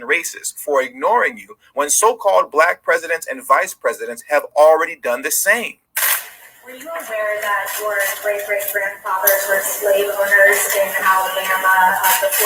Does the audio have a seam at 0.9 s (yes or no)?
no